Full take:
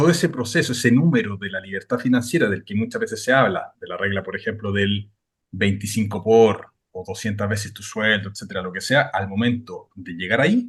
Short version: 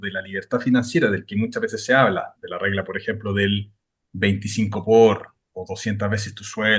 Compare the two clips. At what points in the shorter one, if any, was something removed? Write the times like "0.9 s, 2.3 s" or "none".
none